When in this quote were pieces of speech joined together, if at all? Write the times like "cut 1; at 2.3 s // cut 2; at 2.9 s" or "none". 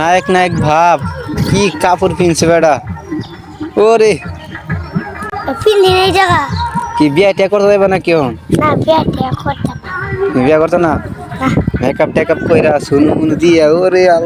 none